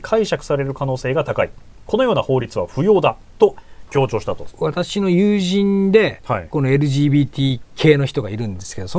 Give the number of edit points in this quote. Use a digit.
1